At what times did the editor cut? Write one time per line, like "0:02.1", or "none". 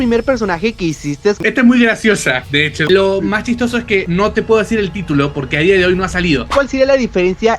0:01.4
0:02.8
0:06.5